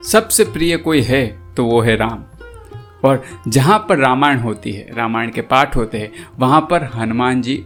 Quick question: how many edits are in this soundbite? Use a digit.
0